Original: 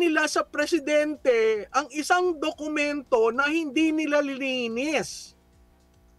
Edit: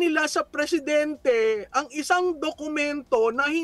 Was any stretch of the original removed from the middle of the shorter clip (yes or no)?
no